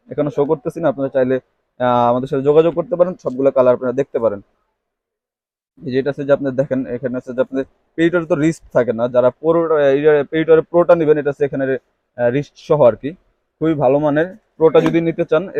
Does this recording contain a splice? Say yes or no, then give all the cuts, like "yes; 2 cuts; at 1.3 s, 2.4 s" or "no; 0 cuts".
no; 0 cuts